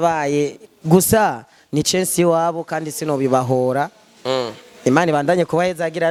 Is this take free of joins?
yes; 0 cuts

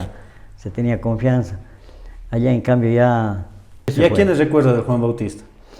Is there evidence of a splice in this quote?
yes; 1 cut; at 3.9 s

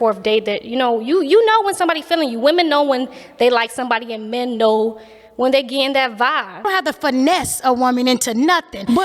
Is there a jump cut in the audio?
yes; 1 cut; at 6.6 s

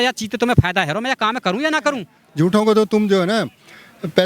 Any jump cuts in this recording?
yes; 1 cut; at 2.1 s

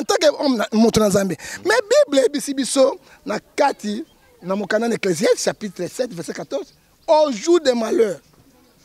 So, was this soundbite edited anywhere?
no; 0 cuts

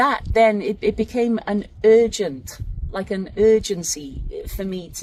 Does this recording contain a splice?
no; 0 cuts

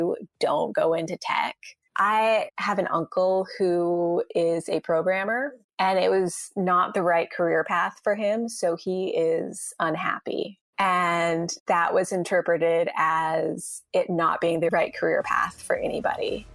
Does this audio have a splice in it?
yes; 3 cuts; at 1.7 s, 5.6 s, 10.6 s

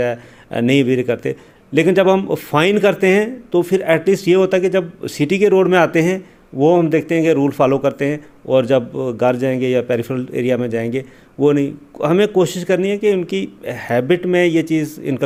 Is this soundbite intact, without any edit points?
yes; 0 cuts

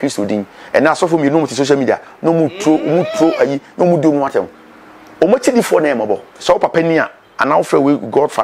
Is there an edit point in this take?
no; 0 cuts

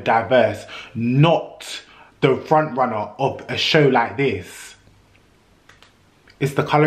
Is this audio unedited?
yes; 0 cuts

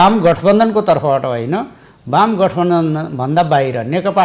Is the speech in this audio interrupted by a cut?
no; 0 cuts

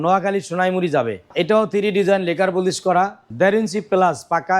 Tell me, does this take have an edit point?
yes; 2 cuts; at 1.3 s, 3.2 s

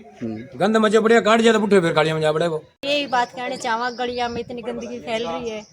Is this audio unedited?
no; 1 cut; at 2.7 s

